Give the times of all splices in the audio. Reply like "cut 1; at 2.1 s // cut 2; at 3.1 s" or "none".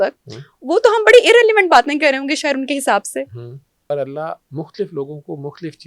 cut 1; at 3.9 s